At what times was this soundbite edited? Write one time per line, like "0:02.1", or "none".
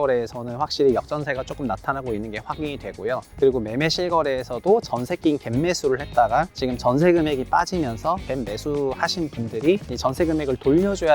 0:08.2
0:09.9